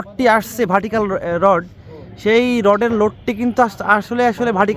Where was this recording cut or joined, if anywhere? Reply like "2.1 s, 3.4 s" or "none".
none